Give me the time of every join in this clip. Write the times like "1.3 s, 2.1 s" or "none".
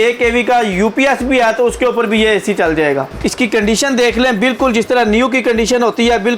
3.2 s